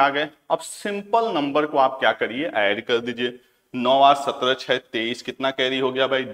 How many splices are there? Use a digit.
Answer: 0